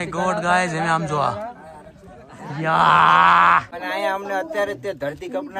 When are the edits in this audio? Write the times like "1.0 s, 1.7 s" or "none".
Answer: 3.7 s